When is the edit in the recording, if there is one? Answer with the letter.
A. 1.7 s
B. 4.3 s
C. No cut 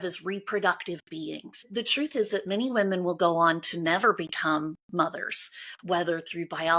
A